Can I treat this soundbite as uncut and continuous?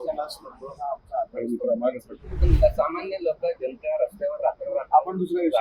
no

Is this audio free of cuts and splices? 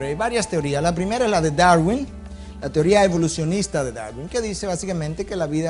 yes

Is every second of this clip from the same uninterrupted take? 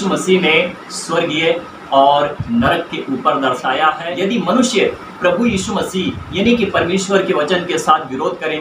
no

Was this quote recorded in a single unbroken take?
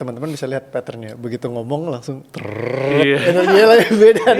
yes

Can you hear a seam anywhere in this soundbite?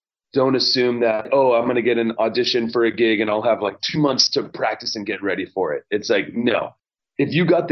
yes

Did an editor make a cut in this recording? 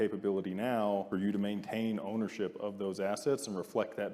yes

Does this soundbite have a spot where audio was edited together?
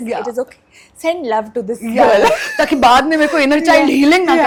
no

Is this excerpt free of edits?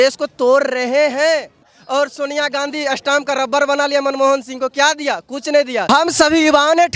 no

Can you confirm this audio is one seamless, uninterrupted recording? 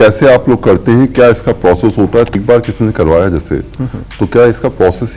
no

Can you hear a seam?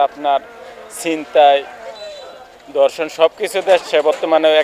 no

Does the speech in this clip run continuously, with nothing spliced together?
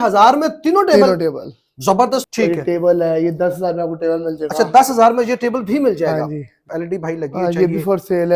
no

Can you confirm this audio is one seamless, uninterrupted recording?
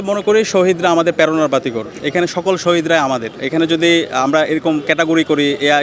no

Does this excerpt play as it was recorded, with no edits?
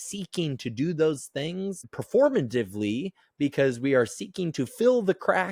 yes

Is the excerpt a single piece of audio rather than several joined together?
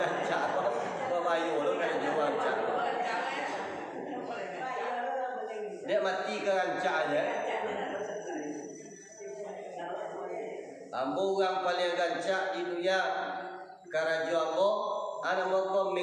yes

